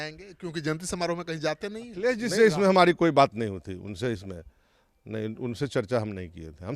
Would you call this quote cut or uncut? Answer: cut